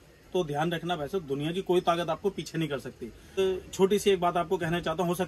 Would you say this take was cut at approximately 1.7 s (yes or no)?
no